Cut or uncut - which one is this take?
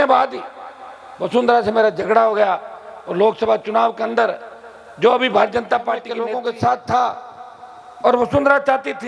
cut